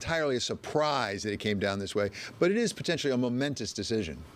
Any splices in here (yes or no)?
no